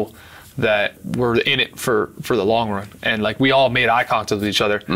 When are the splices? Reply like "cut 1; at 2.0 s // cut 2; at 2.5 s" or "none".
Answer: cut 1; at 1.0 s